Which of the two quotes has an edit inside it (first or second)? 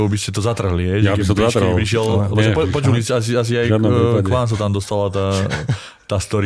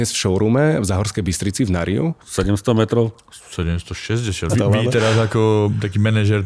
second